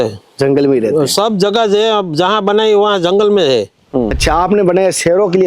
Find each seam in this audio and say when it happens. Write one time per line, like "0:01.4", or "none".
0:04.2